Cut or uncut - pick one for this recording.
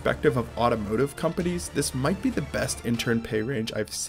uncut